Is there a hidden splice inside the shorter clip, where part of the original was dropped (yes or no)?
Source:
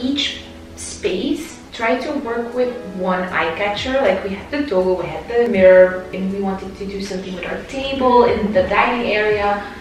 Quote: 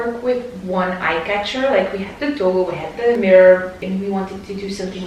no